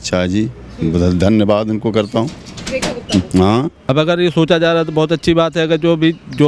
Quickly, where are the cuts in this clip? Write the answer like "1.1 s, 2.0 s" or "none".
3.9 s